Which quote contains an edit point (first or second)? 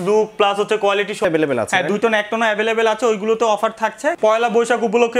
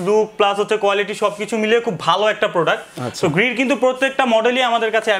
first